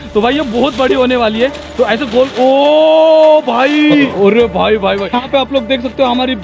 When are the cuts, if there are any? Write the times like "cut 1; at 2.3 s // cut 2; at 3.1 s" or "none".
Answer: cut 1; at 4.1 s // cut 2; at 5.2 s